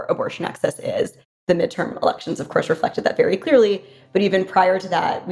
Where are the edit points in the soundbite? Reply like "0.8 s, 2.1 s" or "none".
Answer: 1.4 s